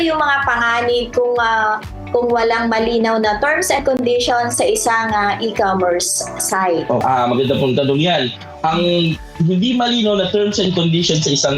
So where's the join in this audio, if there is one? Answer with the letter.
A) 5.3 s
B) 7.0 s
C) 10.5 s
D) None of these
B